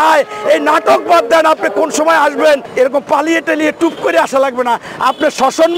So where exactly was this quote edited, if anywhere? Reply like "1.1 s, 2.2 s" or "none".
2.7 s